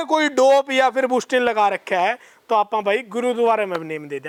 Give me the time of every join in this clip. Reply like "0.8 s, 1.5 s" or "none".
none